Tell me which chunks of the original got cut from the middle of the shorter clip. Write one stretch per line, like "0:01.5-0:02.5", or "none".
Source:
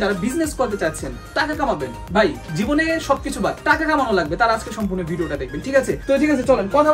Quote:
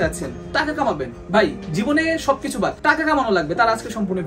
none

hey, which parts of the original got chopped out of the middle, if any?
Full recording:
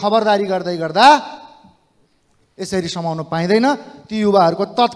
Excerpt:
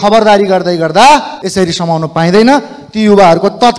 0:01.4-0:02.5

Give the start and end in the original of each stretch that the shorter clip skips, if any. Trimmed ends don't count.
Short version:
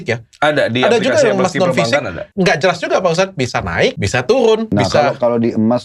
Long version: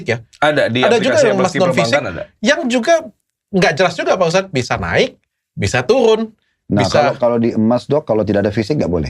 0:02.2-0:03.4
0:05.2-0:05.6
0:06.3-0:06.7

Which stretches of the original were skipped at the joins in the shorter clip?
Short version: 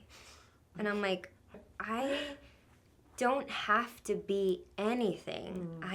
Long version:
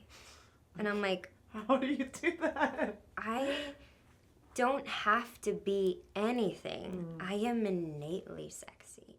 0:01.6-0:03.0

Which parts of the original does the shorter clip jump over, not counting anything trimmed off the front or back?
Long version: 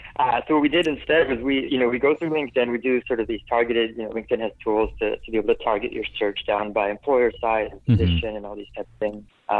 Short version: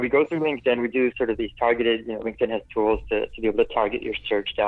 none

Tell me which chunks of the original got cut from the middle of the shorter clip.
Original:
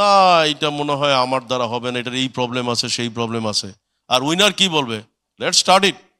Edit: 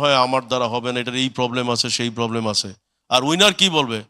none

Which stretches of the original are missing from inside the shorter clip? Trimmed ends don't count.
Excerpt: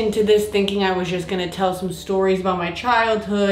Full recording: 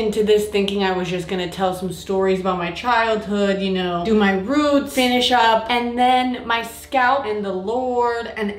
none

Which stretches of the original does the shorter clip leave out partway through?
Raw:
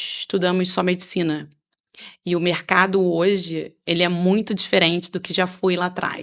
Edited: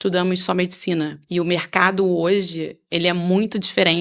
0:01.5-0:02.1

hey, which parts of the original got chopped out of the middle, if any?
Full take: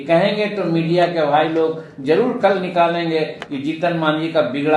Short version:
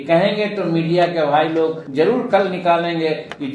0:01.8-0:01.9

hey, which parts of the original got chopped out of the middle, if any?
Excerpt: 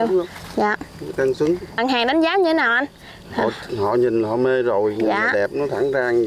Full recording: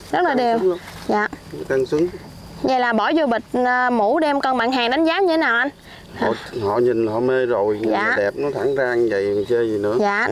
0:02.3-0:04.6

